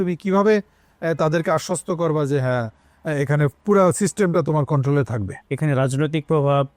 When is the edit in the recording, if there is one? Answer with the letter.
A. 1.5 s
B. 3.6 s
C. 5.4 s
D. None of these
C